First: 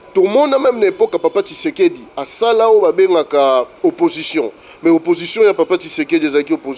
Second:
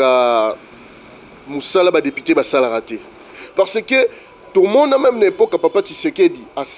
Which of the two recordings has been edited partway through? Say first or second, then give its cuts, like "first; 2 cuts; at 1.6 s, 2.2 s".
second; 1 cut; at 3.3 s